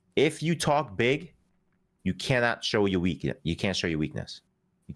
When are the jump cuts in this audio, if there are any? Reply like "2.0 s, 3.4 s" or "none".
none